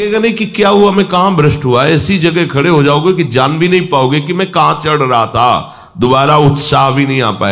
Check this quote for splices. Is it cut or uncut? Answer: uncut